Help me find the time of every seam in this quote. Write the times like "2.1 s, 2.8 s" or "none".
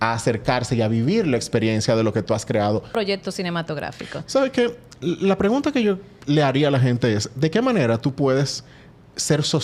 2.9 s